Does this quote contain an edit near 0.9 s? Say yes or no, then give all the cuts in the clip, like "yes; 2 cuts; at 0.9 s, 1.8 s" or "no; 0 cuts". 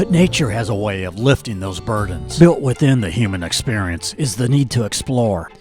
no; 1 cut; at 2.2 s